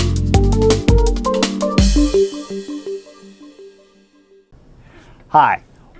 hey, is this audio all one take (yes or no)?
yes